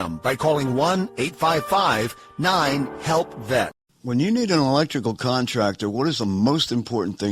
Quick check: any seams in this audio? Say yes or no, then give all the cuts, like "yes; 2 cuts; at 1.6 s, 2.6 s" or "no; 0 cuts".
yes; 1 cut; at 3.9 s